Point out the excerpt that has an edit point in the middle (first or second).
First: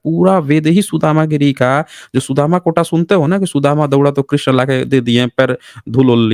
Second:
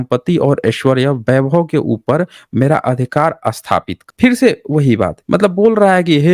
second